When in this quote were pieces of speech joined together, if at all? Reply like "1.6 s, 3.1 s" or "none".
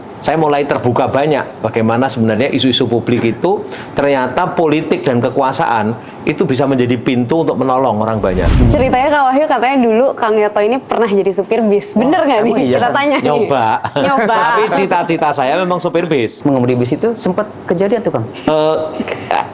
8.5 s, 16.4 s